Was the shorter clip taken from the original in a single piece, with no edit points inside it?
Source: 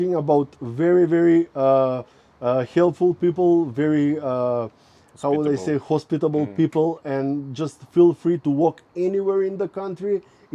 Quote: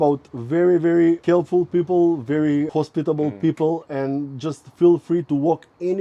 no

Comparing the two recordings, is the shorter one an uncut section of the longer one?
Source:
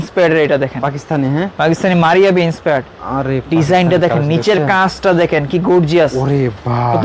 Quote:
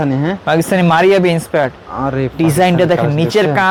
yes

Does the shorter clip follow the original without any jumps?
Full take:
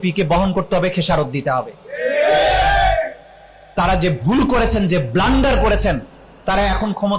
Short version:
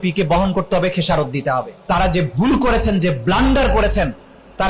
no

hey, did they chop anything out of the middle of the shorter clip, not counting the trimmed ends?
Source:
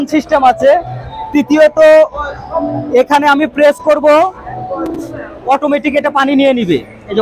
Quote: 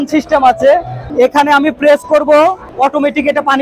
yes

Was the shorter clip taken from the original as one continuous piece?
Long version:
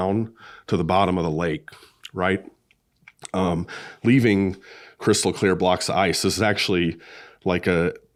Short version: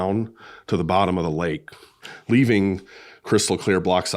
no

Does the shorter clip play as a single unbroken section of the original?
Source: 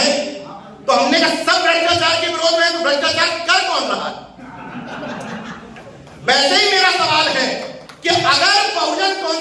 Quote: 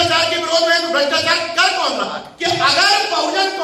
no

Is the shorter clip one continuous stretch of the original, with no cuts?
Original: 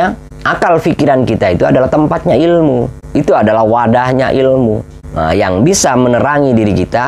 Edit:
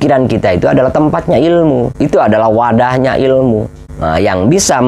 no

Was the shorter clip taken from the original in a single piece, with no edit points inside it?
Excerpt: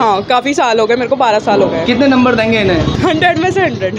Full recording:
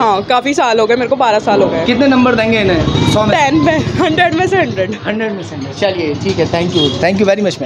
no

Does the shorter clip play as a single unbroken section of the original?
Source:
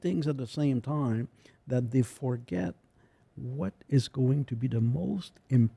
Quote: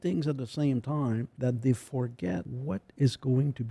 no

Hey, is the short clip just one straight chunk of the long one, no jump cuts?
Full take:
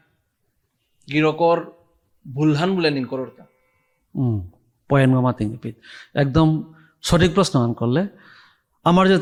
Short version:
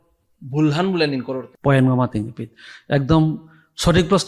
no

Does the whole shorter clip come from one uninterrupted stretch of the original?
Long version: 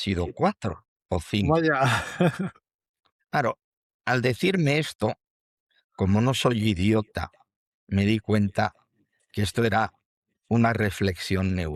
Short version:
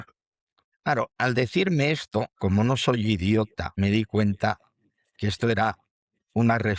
no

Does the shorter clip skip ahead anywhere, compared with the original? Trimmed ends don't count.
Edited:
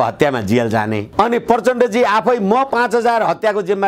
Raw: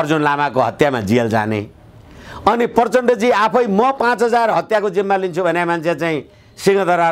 yes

